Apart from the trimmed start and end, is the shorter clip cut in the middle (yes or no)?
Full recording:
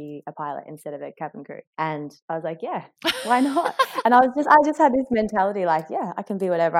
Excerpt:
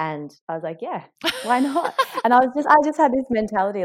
no